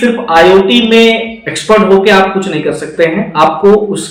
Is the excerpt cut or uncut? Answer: uncut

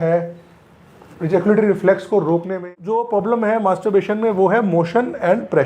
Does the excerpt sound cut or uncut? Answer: cut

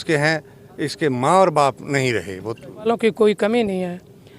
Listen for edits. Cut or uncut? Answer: cut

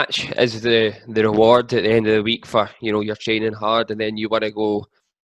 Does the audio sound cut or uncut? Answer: uncut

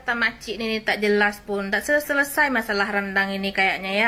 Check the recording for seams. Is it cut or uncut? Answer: uncut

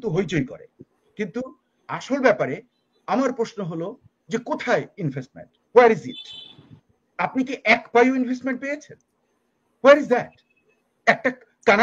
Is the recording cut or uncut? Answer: uncut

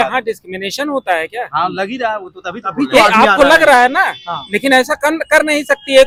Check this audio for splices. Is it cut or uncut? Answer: uncut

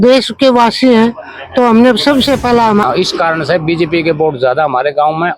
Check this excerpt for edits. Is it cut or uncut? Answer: cut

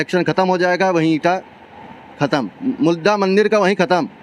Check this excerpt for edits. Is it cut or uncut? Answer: uncut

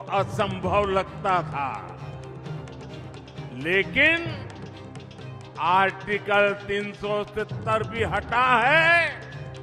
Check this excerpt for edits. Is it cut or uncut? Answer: cut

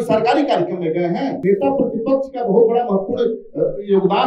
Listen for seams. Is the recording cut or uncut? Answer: cut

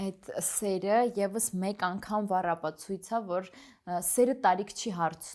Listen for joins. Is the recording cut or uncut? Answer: uncut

